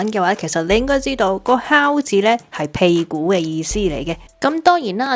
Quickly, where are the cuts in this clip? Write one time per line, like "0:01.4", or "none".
0:04.2